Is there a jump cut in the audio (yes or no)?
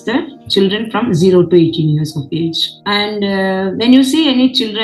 no